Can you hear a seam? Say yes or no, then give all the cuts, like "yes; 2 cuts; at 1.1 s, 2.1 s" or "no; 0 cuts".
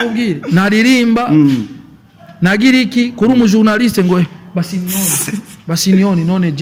no; 0 cuts